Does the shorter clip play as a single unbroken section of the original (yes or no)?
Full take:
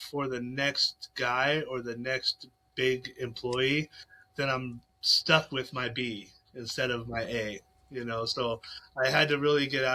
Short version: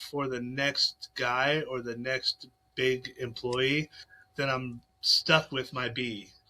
yes